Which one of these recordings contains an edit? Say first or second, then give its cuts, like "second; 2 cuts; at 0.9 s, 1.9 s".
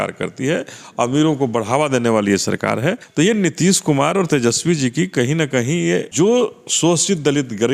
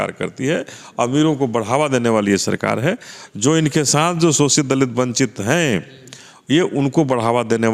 first; 2 cuts; at 3.0 s, 6.1 s